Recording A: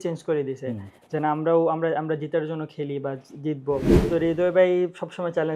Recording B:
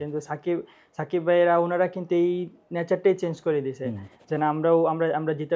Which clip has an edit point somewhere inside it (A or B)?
A